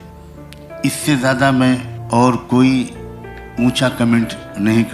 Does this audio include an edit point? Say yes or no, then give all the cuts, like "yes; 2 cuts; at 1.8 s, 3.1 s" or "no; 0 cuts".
yes; 2 cuts; at 0.8 s, 1.9 s